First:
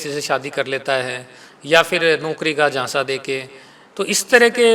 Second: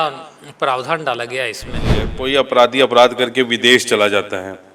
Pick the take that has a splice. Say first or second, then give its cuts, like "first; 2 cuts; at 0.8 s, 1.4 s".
second; 1 cut; at 2.1 s